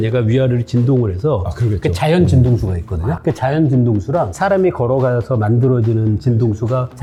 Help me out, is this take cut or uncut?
uncut